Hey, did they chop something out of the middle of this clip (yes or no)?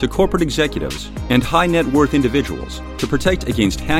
no